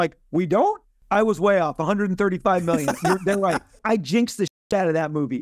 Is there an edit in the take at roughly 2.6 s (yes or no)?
no